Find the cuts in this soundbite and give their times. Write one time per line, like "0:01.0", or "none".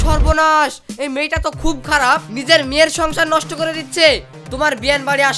0:04.4